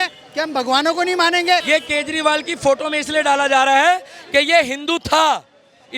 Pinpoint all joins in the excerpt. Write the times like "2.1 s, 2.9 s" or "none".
1.6 s